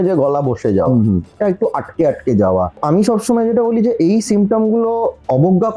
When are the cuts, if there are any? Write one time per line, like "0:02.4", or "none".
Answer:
0:01.3
0:02.8